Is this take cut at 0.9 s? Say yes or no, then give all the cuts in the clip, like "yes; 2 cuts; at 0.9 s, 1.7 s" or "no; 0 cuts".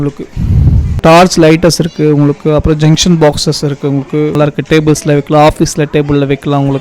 yes; 2 cuts; at 0.9 s, 4.4 s